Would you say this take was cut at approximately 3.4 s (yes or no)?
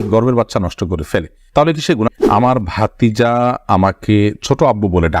no